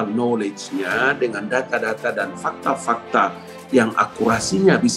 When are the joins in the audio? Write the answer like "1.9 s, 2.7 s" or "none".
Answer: none